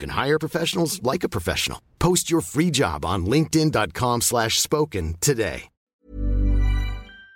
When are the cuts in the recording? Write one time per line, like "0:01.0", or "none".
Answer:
0:05.9